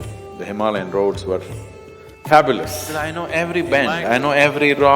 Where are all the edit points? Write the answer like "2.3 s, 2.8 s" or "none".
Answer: 3.3 s